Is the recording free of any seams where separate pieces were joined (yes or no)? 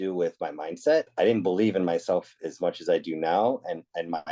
no